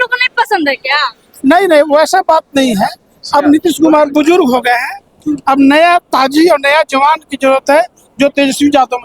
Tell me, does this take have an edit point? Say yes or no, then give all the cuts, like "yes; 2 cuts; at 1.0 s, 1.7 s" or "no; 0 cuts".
no; 0 cuts